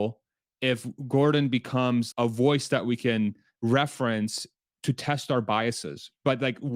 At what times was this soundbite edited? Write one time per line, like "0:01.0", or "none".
0:02.1